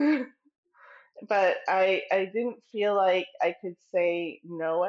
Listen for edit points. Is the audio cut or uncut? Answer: uncut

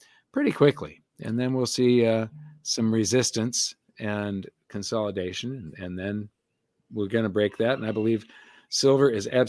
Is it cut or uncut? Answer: uncut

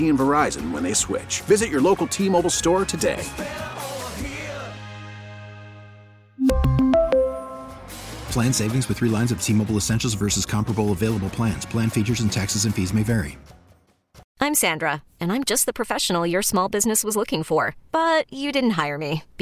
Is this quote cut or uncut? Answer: cut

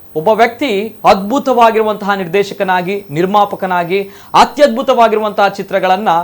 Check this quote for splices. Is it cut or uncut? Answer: uncut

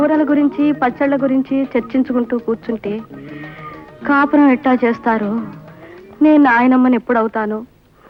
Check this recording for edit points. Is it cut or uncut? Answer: uncut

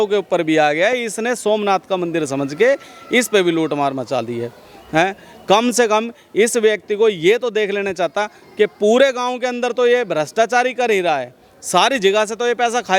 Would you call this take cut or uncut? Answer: uncut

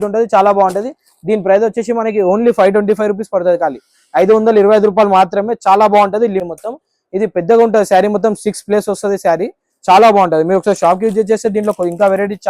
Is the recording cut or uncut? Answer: cut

